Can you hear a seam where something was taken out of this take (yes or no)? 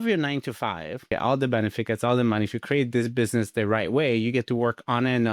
yes